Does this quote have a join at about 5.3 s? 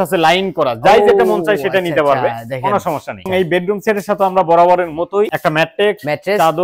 yes; 2 cuts; at 3.3 s, 5.3 s

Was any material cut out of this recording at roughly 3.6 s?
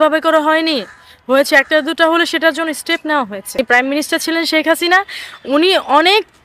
yes; 1 cut; at 3.6 s

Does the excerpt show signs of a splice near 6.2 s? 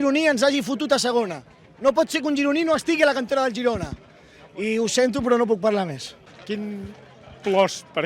yes; 1 cut; at 6.2 s

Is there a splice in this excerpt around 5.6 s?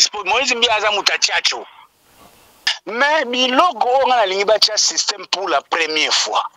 no; 1 cut; at 2.8 s

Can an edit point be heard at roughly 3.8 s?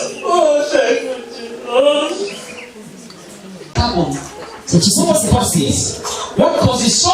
yes; 1 cut; at 3.8 s

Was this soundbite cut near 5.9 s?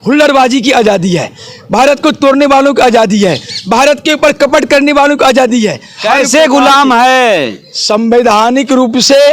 yes; 1 cut; at 5.9 s

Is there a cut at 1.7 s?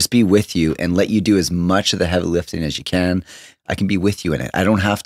no; 1 cut; at 3.5 s

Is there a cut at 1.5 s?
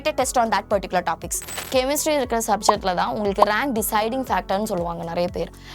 yes; 1 cut; at 1.5 s

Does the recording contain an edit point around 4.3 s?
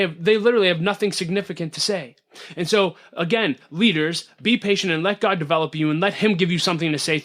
yes; 1 cut; at 4.3 s

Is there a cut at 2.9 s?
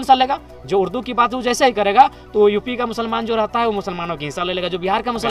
no; 0 cuts

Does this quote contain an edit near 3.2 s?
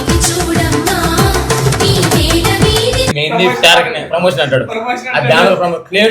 yes; 1 cut; at 3.2 s

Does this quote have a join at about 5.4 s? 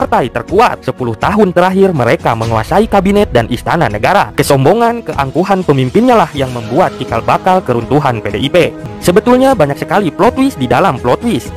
no; 1 cut; at 8.9 s

